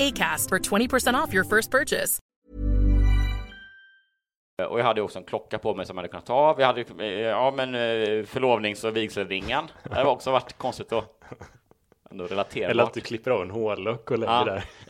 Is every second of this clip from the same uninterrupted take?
no; 2 cuts; at 2.2 s, 4.6 s

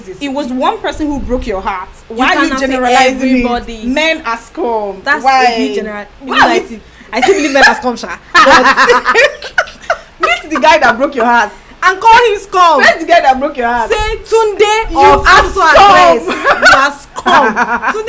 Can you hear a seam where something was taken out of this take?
no; 0 cuts

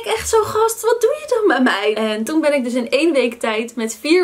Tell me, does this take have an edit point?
yes; 1 cut; at 2.0 s

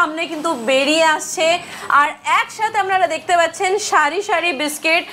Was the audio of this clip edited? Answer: no; 0 cuts

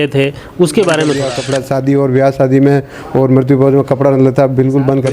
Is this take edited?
yes; 1 cut; at 1.4 s

